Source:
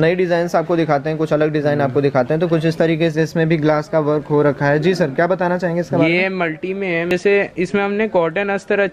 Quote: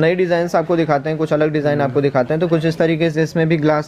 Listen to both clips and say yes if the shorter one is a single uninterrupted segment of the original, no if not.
yes